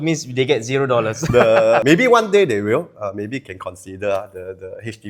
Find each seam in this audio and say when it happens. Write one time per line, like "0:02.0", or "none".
0:01.8